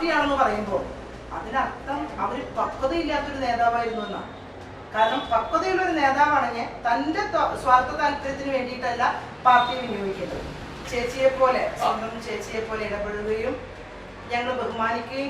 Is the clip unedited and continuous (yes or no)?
no